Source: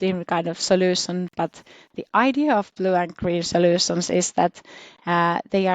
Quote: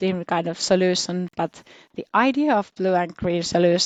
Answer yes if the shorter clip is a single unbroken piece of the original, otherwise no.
yes